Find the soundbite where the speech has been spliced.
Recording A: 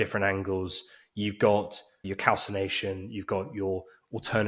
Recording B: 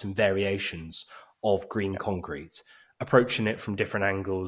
A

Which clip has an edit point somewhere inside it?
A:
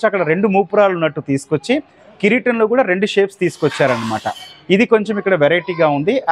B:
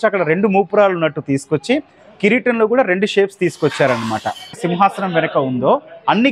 B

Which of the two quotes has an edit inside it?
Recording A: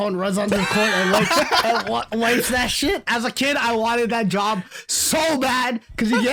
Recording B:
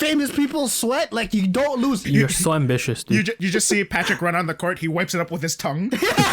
B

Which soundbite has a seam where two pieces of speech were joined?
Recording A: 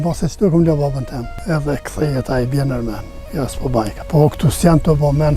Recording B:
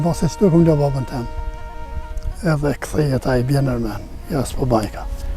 A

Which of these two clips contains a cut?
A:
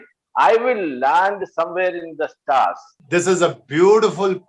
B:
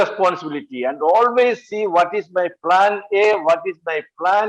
A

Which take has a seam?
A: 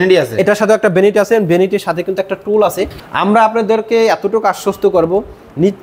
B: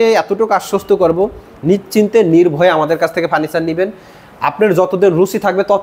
A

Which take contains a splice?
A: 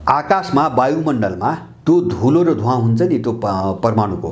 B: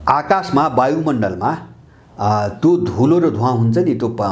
A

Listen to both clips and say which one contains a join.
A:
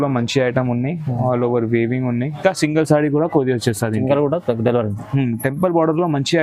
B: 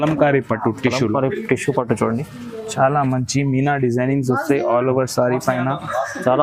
A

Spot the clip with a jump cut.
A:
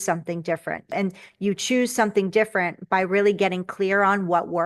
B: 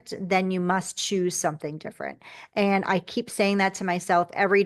A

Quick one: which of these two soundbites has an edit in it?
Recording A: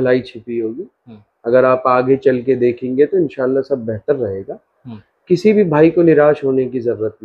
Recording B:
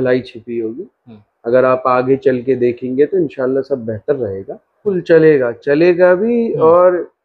B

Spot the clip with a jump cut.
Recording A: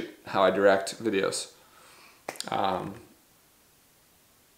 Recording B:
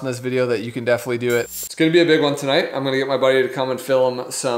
B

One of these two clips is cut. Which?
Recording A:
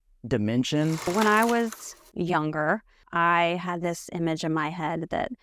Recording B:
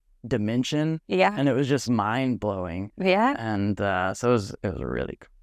A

